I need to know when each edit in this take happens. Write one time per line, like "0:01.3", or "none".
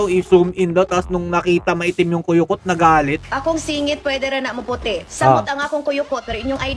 0:03.2